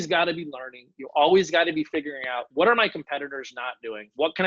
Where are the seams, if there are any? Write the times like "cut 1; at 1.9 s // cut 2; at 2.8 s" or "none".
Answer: cut 1; at 2.5 s